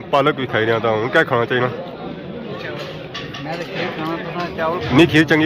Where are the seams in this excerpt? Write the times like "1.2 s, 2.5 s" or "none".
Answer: none